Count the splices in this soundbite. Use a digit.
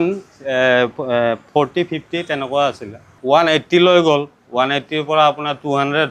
1